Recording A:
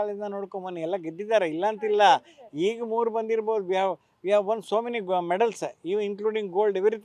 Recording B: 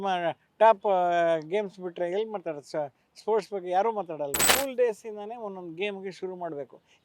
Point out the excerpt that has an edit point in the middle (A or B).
B